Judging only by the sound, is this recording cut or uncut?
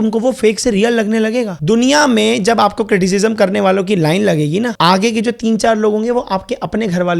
cut